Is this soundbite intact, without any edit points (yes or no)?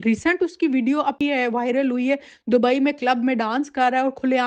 yes